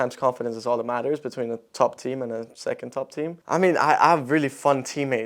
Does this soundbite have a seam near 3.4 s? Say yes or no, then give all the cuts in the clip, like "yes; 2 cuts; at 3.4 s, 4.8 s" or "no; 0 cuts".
yes; 1 cut; at 3.4 s